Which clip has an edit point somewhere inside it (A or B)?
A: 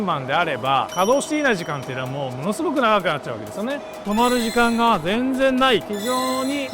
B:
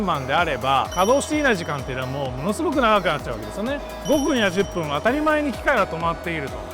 A